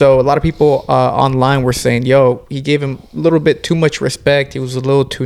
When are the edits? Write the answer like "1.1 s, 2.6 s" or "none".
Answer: none